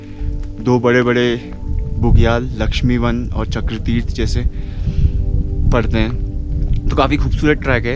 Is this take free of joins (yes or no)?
yes